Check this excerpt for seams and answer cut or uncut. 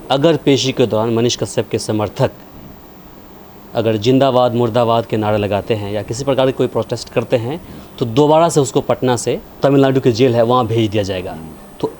cut